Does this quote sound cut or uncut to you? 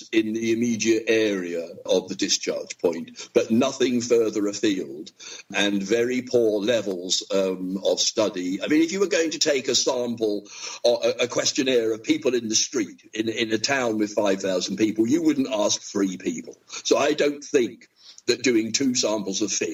uncut